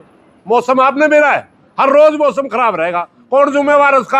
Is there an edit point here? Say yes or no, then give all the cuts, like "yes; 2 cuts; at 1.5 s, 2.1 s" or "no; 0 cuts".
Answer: no; 0 cuts